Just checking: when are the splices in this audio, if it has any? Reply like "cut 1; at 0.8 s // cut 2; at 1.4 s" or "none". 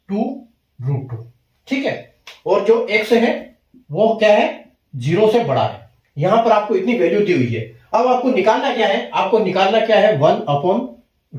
none

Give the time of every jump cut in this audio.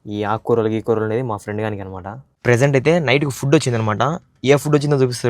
cut 1; at 2.2 s

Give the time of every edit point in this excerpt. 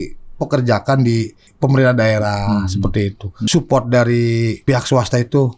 cut 1; at 1.4 s // cut 2; at 3.3 s // cut 3; at 4.6 s

